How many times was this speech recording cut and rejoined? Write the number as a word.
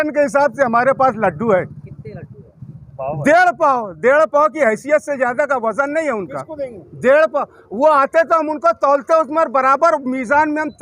zero